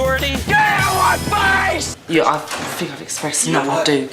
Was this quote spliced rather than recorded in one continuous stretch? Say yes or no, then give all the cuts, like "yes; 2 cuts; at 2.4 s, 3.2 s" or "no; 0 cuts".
yes; 1 cut; at 1.9 s